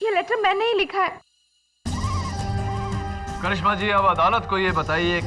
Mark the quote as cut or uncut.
cut